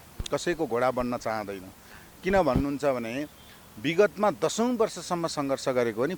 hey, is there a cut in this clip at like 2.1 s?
no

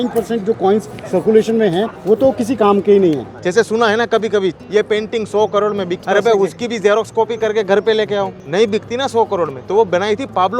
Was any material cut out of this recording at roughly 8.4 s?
yes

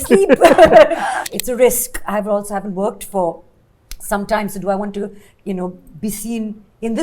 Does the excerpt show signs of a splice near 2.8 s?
no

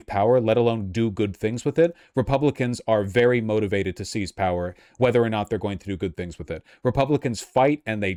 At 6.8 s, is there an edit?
no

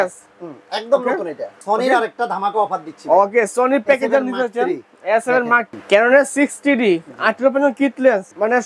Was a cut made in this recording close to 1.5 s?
yes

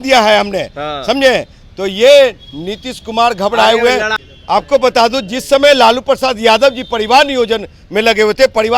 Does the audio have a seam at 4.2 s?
yes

